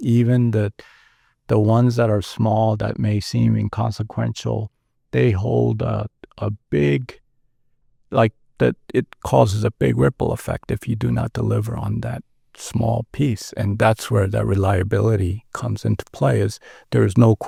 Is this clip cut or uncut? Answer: uncut